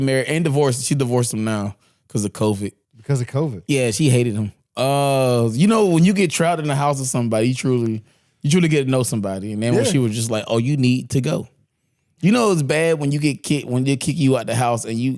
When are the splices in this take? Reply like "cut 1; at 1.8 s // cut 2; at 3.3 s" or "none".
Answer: cut 1; at 2.9 s